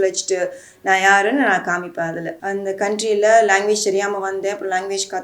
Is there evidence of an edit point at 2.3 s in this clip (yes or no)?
yes